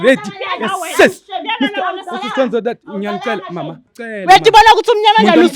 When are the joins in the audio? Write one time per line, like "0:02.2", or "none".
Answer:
0:03.9